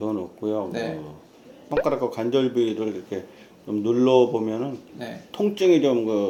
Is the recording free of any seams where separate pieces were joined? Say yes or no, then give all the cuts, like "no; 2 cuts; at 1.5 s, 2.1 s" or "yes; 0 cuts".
yes; 0 cuts